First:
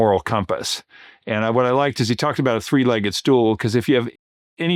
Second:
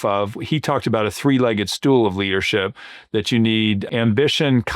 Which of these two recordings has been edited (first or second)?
second